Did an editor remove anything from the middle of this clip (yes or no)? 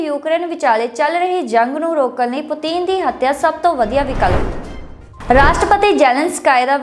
yes